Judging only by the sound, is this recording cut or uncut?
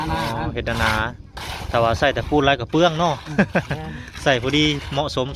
uncut